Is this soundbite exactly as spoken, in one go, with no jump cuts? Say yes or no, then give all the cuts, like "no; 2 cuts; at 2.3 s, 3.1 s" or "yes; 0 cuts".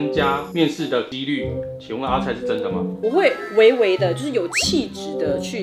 no; 1 cut; at 2.9 s